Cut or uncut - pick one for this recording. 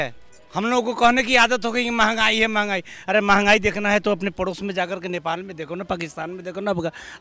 uncut